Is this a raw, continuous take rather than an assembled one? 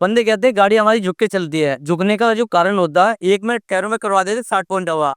no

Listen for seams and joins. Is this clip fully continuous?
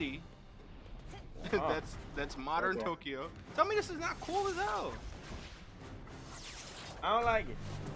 yes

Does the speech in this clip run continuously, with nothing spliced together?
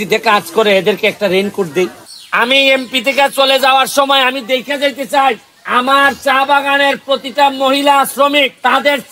no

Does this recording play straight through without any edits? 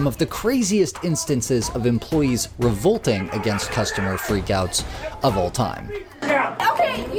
yes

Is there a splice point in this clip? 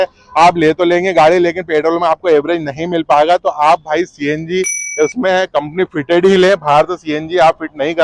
no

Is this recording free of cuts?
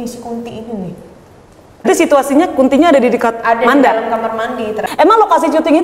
no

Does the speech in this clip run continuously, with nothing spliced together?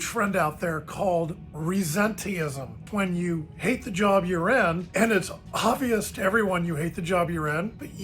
no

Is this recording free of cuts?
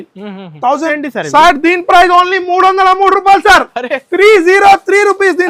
no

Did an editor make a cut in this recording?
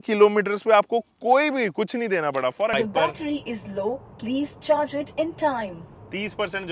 yes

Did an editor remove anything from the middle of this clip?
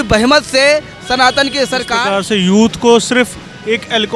yes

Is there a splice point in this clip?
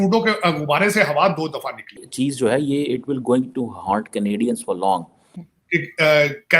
yes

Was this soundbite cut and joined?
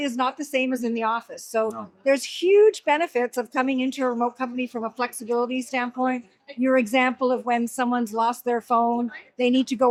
no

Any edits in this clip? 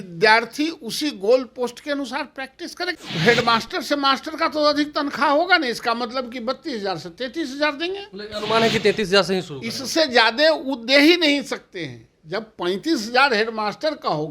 yes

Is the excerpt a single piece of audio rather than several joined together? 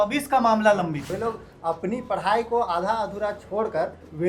no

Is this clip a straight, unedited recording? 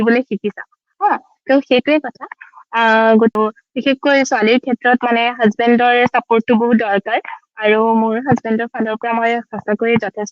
no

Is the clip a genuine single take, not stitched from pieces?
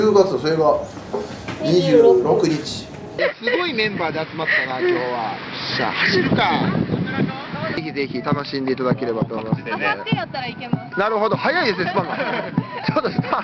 yes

